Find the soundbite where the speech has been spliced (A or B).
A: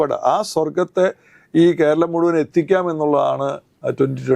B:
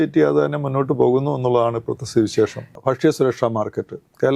B